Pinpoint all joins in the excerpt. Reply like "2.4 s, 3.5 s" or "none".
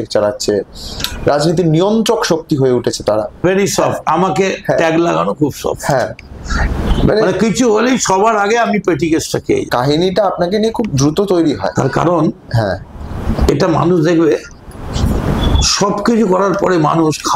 3.4 s, 9.7 s